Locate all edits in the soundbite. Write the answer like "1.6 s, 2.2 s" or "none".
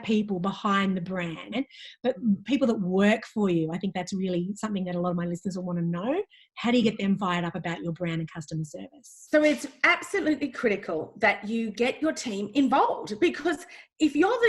1.5 s

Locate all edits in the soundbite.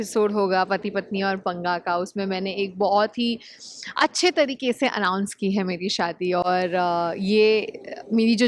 none

